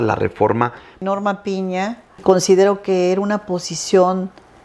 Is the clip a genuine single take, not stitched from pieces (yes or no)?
no